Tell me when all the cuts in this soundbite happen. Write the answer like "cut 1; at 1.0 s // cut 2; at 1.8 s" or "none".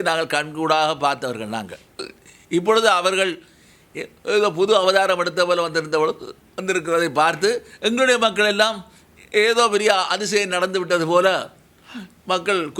none